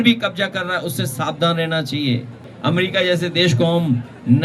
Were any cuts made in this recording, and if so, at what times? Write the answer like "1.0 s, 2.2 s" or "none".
2.5 s